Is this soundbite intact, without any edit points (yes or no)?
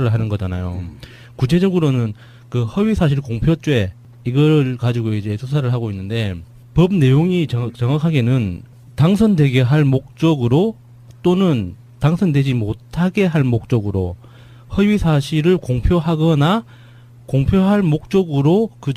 no